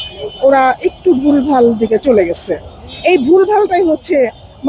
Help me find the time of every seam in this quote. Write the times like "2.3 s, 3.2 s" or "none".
none